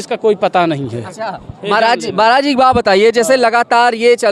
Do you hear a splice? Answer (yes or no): no